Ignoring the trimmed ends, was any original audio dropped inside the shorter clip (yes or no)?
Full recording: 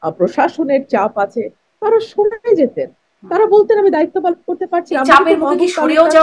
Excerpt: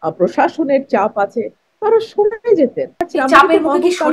yes